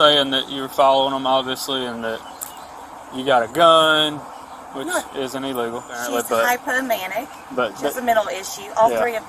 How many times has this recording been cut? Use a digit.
1